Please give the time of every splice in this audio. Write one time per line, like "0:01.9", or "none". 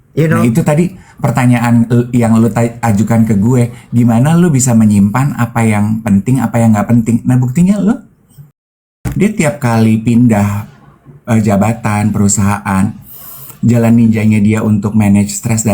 0:09.0